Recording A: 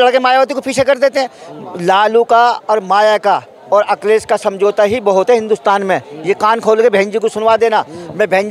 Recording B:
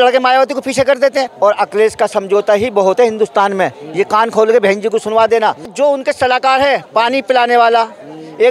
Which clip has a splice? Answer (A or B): B